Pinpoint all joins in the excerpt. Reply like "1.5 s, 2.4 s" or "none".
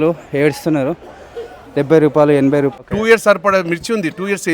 2.7 s